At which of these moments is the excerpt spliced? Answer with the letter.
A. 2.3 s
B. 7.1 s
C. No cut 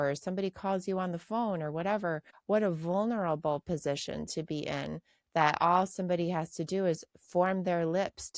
A